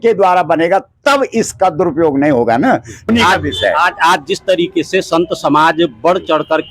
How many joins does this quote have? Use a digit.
1